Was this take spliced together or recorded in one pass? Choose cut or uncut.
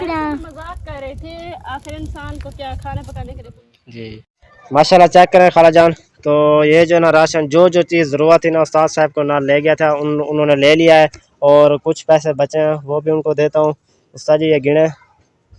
cut